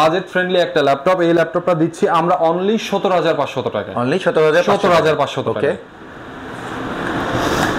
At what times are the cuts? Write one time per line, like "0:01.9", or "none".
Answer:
none

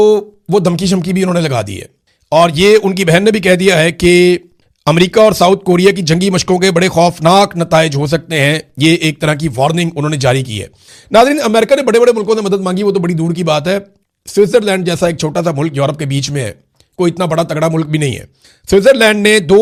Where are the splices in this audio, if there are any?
none

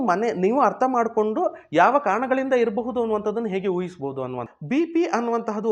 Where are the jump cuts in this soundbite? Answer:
0:04.5

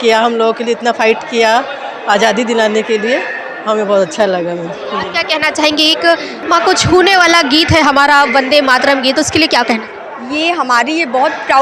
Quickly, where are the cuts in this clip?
none

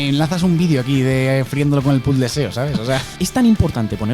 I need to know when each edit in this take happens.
0:03.1

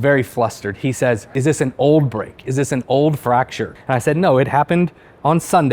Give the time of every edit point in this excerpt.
0:01.4
0:03.7

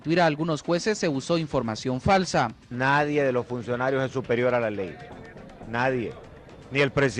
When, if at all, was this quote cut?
0:03.7

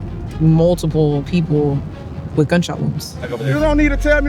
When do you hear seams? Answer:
0:03.3

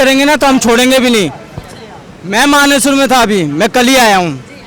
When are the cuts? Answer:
none

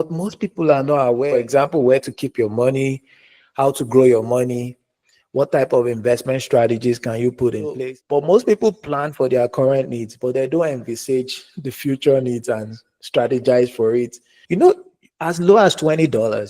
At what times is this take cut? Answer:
0:01.3
0:07.8
0:14.3

